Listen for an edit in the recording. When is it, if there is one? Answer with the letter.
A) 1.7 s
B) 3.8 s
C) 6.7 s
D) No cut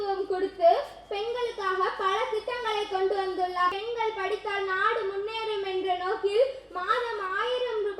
B